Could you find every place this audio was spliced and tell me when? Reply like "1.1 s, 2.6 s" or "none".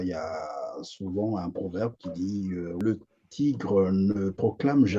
2.8 s

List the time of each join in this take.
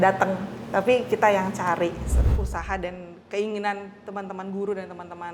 2.1 s

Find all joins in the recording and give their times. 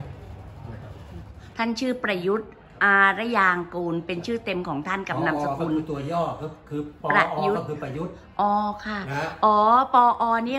1.4 s

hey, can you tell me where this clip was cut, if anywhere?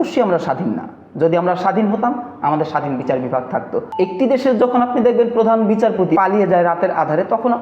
3.9 s, 6.2 s

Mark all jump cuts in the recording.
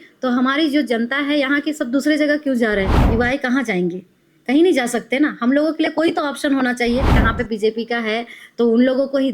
3.0 s, 7.3 s

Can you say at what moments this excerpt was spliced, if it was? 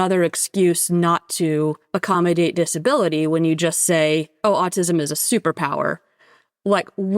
1.9 s, 4.3 s

